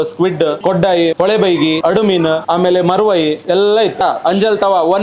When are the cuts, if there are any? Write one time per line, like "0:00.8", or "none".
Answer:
0:04.0